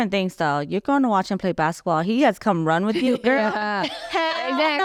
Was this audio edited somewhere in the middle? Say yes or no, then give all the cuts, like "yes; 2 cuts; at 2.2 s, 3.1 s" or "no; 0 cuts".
no; 0 cuts